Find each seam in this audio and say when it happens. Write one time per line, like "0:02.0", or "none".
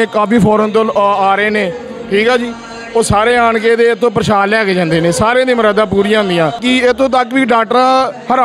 0:06.6